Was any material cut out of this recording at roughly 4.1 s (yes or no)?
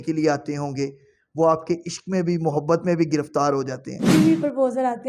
yes